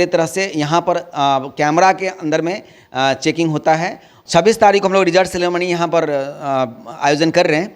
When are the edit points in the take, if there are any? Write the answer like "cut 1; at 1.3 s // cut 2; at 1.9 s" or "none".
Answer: cut 1; at 4.1 s